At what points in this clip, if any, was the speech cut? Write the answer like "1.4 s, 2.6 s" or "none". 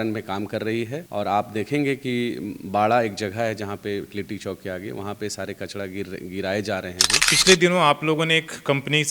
1.0 s, 7.3 s